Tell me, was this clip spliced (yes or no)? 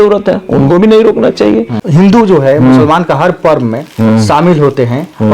yes